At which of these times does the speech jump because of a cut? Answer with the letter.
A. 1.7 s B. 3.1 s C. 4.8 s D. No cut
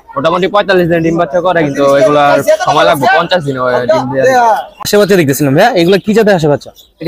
C